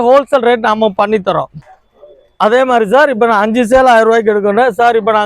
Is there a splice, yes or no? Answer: yes